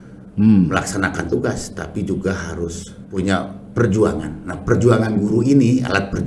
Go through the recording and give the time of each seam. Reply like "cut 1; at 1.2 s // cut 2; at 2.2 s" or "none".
cut 1; at 3.1 s